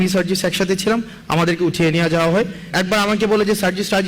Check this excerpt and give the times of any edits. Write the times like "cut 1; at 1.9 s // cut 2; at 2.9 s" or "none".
cut 1; at 2.7 s

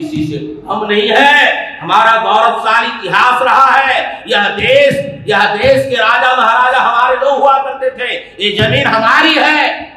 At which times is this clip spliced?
none

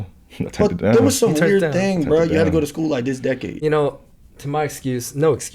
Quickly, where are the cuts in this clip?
cut 1; at 3.5 s

